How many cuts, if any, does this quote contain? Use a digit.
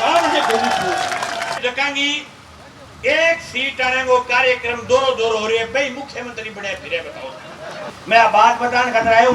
2